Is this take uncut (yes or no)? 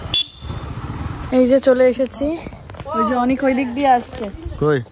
no